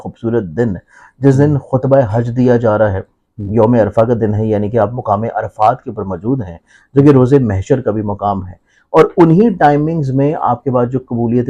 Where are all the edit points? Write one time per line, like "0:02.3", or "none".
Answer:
none